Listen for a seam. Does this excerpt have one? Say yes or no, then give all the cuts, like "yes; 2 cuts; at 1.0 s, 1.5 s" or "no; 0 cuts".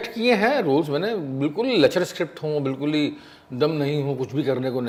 no; 0 cuts